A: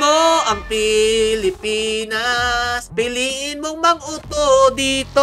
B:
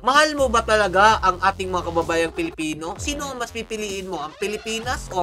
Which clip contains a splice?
A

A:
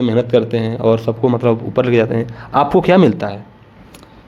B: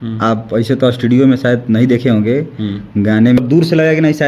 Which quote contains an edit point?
B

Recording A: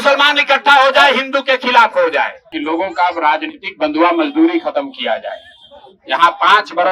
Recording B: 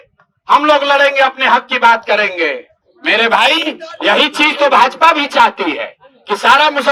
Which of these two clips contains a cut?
A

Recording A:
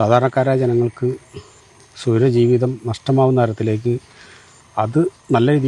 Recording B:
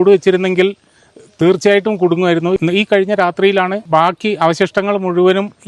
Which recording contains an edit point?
B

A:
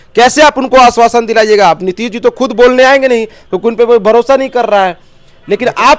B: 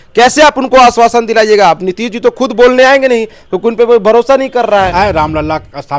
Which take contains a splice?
B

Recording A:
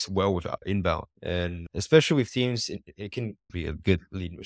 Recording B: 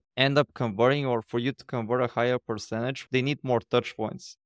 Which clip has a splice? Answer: A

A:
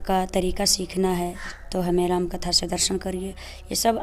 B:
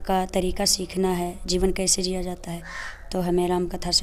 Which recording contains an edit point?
A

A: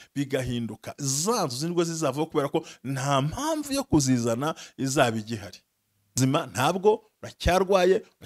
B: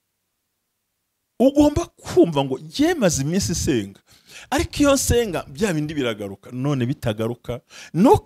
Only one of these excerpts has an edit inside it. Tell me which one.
A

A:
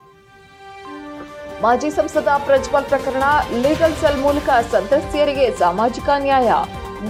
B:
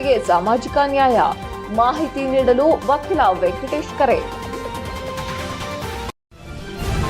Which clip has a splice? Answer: B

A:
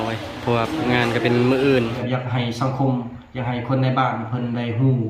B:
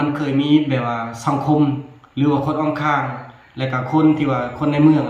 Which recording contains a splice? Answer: A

